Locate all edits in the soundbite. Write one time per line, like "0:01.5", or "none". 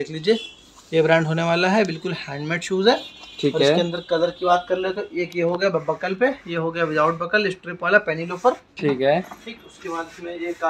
none